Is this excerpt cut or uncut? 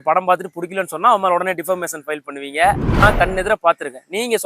cut